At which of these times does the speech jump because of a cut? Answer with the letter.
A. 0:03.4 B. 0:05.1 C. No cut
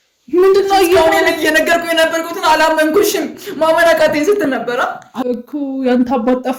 B